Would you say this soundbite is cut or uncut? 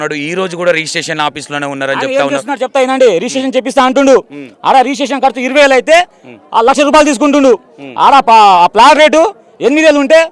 uncut